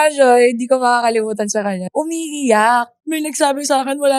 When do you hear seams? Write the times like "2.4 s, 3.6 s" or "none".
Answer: 1.8 s, 3.0 s